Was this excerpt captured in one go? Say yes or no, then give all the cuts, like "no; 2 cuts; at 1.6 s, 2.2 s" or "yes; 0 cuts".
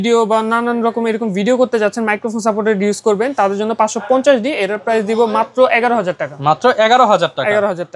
yes; 0 cuts